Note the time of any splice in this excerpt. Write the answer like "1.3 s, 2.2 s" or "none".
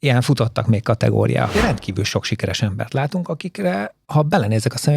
1.5 s